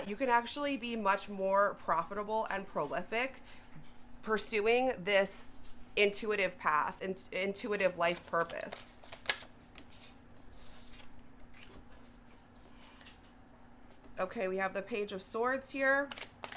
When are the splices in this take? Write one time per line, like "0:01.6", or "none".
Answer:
none